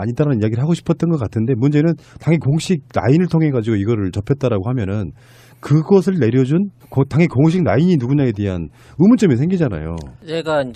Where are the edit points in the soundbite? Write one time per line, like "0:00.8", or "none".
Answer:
none

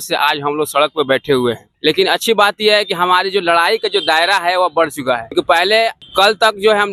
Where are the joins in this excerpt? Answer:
none

